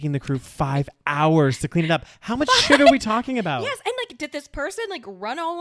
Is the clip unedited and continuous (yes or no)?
yes